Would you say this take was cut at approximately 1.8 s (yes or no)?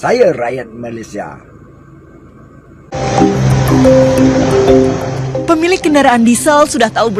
no